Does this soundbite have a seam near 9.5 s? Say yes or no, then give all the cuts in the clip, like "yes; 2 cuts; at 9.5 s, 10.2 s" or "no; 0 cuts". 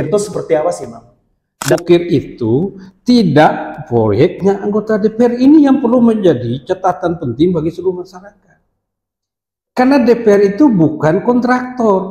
no; 1 cut; at 1.5 s